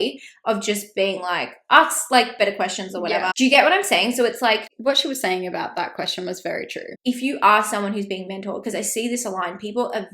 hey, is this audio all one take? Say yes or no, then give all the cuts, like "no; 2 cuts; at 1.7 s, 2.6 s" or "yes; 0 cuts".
no; 3 cuts; at 3.3 s, 4.7 s, 6.8 s